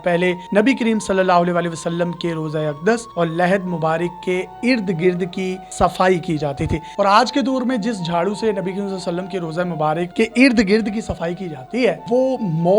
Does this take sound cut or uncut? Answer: cut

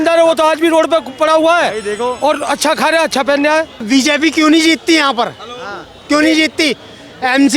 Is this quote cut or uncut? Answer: cut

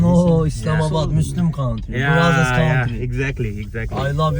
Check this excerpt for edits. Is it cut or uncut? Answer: uncut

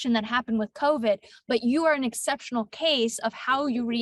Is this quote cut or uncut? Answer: uncut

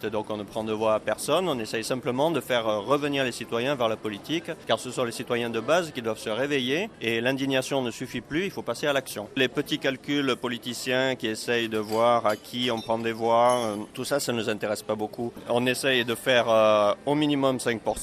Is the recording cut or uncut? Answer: cut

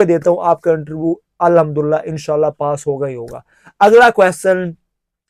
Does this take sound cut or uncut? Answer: uncut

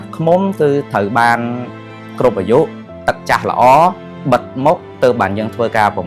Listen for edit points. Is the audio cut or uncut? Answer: uncut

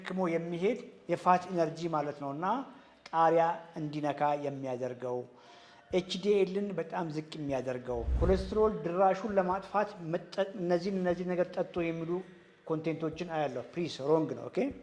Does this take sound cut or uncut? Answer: cut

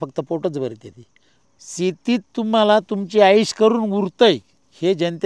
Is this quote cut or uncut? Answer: cut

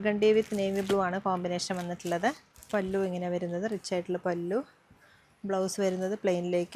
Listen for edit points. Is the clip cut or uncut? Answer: uncut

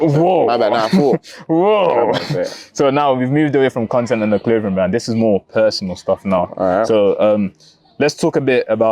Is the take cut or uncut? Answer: uncut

